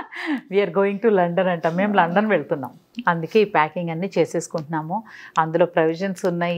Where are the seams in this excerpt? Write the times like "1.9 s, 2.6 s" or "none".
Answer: 2.9 s